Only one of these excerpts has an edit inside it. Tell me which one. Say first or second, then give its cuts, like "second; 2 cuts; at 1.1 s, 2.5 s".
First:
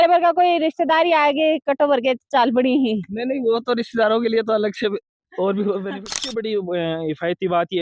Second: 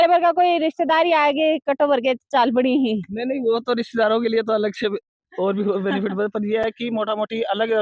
first; 1 cut; at 6.0 s